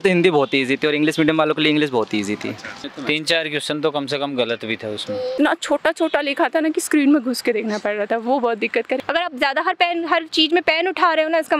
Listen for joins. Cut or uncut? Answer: cut